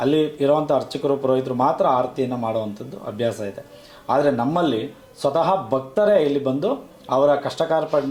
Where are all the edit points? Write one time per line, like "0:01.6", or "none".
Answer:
none